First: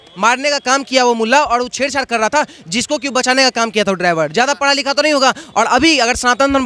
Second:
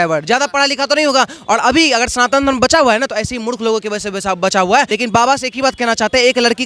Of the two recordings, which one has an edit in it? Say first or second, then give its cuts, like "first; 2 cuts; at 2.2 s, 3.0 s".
second; 1 cut; at 4.9 s